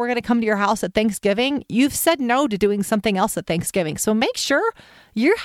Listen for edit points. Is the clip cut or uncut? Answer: uncut